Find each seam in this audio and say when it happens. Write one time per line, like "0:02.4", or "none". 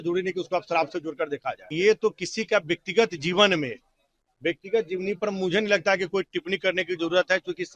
0:01.6